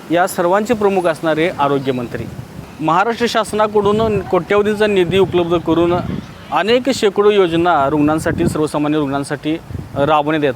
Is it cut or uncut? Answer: cut